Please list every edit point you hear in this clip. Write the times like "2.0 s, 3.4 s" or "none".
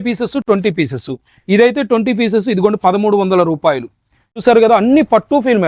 4.4 s